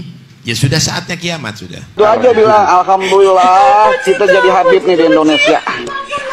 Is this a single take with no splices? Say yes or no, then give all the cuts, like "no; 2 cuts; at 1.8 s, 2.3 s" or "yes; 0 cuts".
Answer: no; 1 cut; at 2.0 s